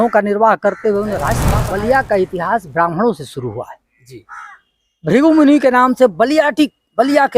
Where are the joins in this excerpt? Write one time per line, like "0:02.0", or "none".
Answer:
0:01.5